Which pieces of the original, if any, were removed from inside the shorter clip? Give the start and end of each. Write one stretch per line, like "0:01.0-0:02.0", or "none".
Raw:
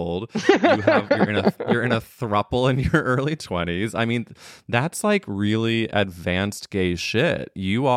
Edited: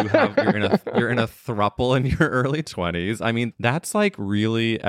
0:04.3-0:04.6